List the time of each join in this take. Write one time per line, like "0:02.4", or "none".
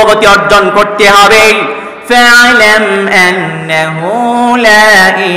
none